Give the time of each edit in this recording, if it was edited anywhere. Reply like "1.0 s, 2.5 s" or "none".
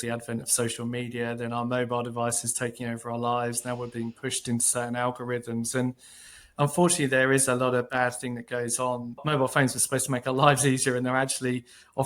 none